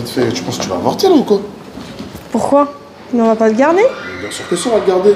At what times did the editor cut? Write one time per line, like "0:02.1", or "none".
none